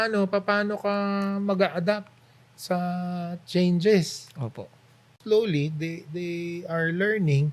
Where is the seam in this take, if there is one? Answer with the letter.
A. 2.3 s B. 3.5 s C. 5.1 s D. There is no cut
C